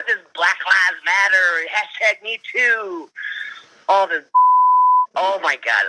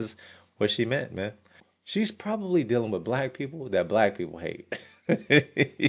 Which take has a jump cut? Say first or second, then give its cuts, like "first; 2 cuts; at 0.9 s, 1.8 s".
second; 1 cut; at 1.5 s